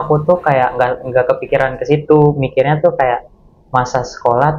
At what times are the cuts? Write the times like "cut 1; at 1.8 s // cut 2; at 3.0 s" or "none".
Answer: none